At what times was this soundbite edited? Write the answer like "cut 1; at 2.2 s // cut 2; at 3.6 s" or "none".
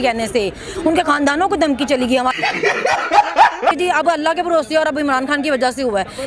cut 1; at 3.7 s